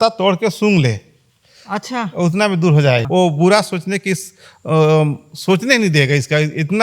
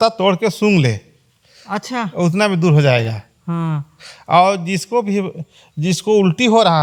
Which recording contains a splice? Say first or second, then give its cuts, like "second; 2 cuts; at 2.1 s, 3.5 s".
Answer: first; 1 cut; at 3.1 s